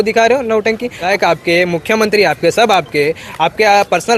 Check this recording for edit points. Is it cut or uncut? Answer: cut